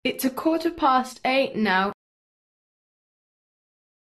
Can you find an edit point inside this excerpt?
no; 0 cuts

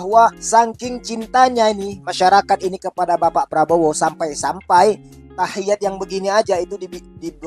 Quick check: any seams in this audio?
no; 0 cuts

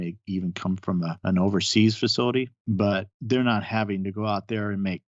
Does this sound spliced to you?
yes; 2 cuts; at 1.2 s, 2.6 s

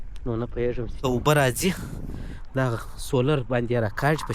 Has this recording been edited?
yes; 1 cut; at 1.0 s

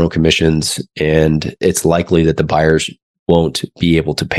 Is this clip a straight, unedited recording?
yes; 0 cuts

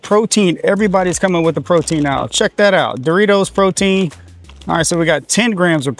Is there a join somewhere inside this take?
no; 0 cuts

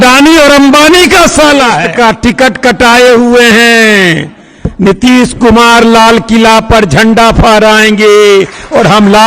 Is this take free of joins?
no; 1 cut; at 1.8 s

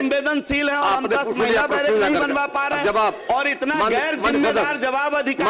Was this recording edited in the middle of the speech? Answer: no; 0 cuts

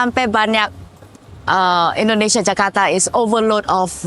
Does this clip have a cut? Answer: no; 0 cuts

